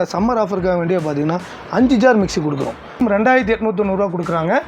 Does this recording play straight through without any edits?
no; 1 cut; at 3.0 s

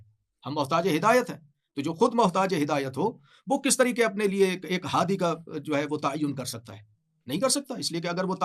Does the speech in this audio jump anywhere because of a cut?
no; 0 cuts

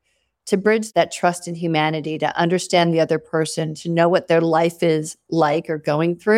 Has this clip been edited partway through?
no; 0 cuts

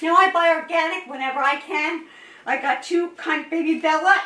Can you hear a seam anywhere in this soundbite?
no; 0 cuts

